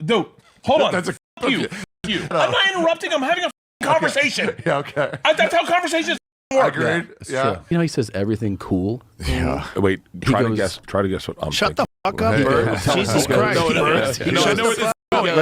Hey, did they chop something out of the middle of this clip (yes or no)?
yes